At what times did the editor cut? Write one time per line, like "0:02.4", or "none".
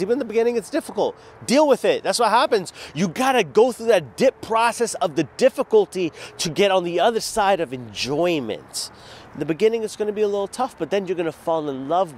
none